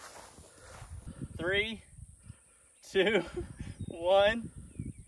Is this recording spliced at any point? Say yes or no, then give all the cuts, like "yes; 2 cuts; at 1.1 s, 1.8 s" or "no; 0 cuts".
yes; 1 cut; at 1.1 s